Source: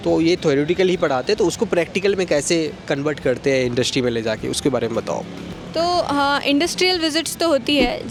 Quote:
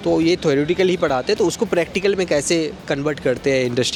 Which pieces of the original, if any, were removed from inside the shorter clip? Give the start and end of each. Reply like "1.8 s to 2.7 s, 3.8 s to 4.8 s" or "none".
none